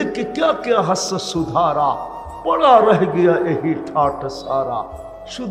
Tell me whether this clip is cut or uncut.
uncut